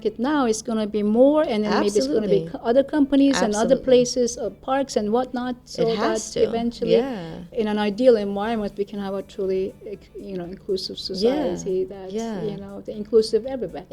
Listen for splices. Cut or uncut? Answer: cut